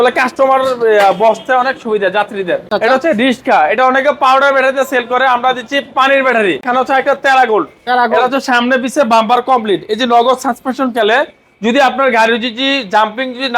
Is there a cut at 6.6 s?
yes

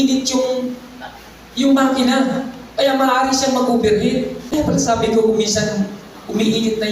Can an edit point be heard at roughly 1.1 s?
no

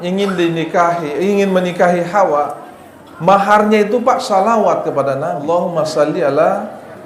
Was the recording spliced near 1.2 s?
no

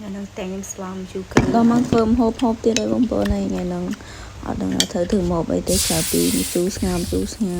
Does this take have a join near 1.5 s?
yes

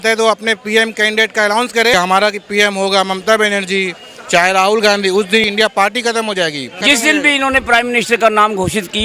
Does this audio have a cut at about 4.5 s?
no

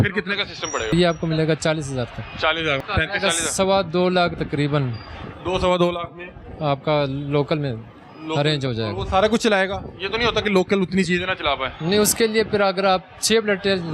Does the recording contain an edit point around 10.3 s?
no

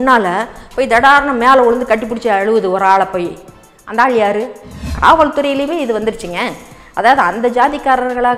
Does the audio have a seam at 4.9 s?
yes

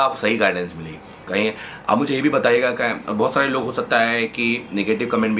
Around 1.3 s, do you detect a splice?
no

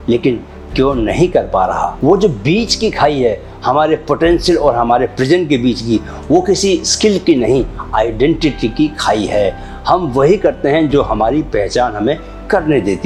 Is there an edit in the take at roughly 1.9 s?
no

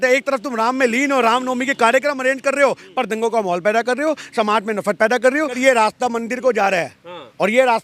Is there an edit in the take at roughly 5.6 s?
yes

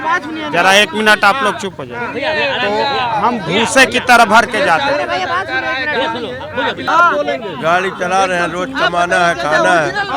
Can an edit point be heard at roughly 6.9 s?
yes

